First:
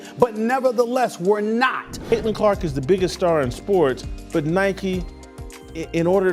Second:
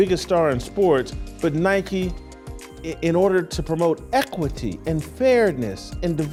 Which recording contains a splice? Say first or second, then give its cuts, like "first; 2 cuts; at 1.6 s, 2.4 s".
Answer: first; 1 cut; at 1.9 s